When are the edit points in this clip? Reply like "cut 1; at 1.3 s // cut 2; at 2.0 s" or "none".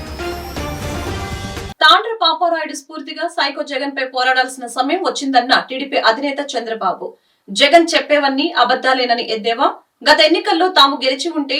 cut 1; at 1.6 s

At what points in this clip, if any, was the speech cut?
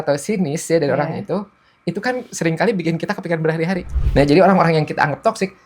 cut 1; at 3.9 s

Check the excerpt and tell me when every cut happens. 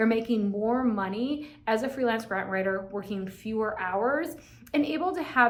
none

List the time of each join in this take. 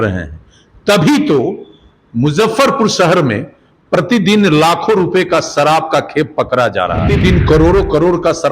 cut 1; at 7.1 s

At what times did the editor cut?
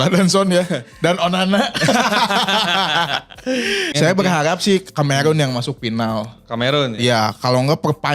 cut 1; at 3.9 s

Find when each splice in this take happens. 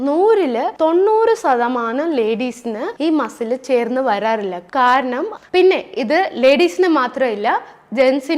cut 1; at 5.3 s

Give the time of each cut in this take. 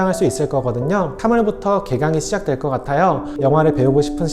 cut 1; at 3.3 s

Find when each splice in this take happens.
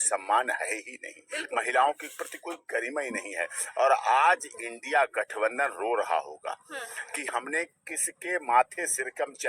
none

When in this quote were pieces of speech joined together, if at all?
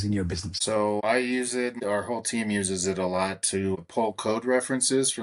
cut 1; at 0.9 s // cut 2; at 1.8 s // cut 3; at 3.8 s

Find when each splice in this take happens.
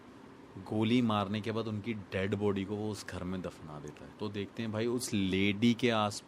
cut 1; at 4.0 s

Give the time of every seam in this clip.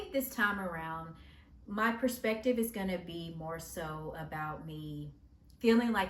none

